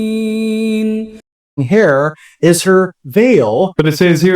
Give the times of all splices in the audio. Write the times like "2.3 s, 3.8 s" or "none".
1.6 s